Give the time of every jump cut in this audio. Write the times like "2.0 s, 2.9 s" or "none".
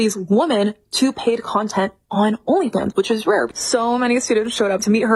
none